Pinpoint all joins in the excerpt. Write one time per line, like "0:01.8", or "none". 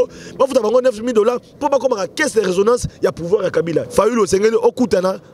0:03.9

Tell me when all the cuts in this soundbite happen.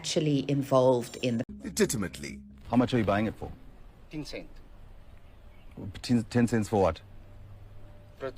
0:01.5

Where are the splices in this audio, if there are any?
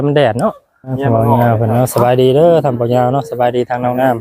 0:01.0

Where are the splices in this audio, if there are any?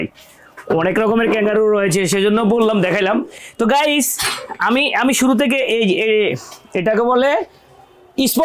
none

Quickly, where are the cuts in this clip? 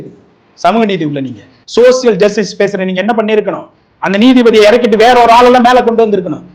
none

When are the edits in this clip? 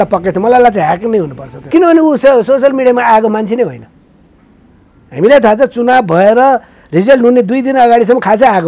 0:01.6

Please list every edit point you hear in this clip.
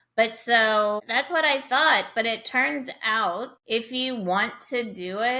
0:01.0
0:03.6

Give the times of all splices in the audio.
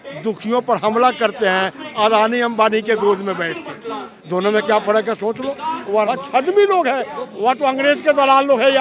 0:05.8

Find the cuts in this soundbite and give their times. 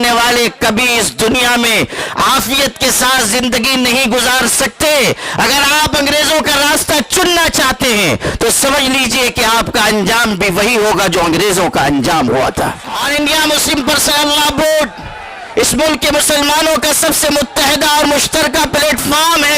0:13.0

